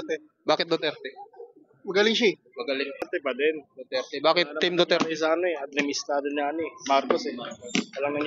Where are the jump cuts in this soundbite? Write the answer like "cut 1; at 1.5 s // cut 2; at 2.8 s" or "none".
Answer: cut 1; at 3.1 s

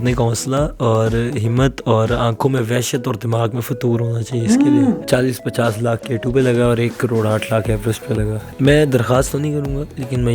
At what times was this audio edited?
cut 1; at 5.0 s // cut 2; at 8.4 s

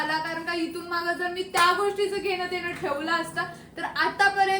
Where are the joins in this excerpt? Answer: none

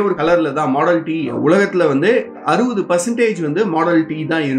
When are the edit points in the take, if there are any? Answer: cut 1; at 1.3 s

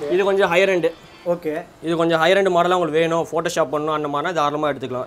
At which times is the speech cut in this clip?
none

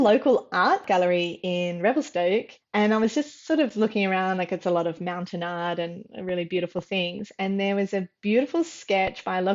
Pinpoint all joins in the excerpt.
cut 1; at 0.8 s // cut 2; at 2.6 s

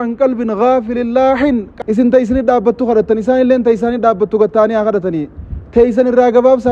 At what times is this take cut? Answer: cut 1; at 1.7 s

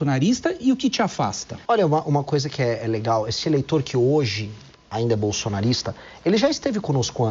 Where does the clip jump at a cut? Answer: cut 1; at 1.5 s

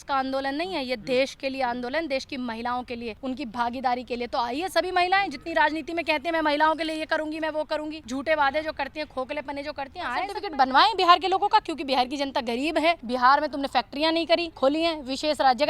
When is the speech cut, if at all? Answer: cut 1; at 3.1 s // cut 2; at 8.0 s // cut 3; at 10.4 s // cut 4; at 13.0 s // cut 5; at 14.5 s

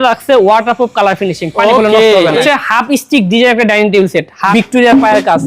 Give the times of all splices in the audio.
cut 1; at 2.4 s // cut 2; at 4.5 s

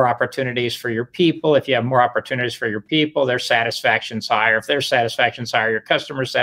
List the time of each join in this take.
none

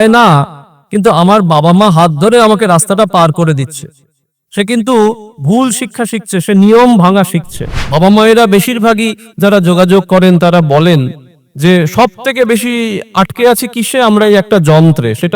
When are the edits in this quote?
cut 1; at 7.7 s

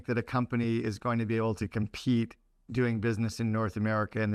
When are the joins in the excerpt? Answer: none

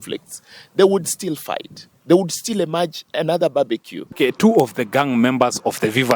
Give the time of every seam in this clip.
cut 1; at 4.2 s

